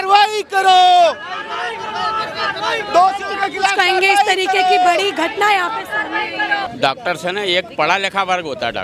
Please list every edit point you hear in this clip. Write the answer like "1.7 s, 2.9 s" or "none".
6.7 s